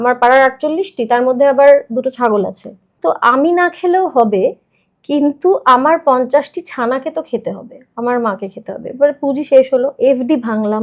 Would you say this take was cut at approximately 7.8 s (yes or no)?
no